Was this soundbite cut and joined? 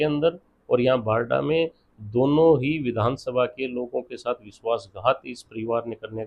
no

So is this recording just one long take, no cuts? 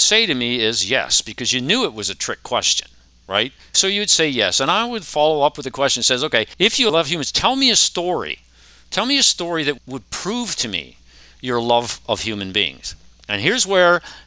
no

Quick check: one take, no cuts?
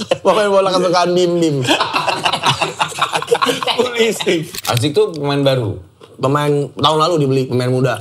no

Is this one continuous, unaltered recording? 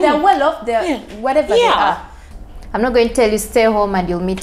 no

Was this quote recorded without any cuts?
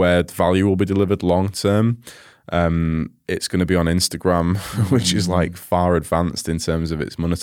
yes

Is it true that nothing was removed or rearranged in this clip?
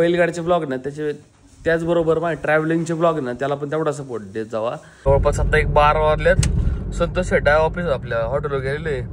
no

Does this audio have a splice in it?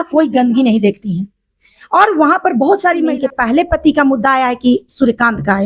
yes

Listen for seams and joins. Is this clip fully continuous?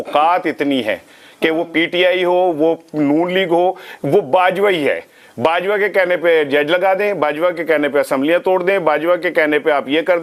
yes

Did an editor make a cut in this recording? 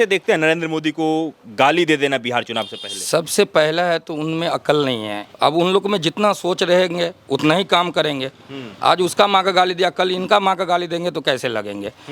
yes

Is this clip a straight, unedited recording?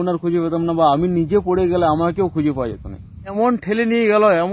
no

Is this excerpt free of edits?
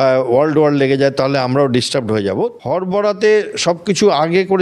no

